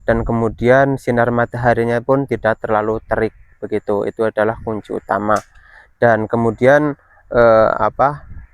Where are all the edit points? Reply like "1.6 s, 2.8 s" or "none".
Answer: none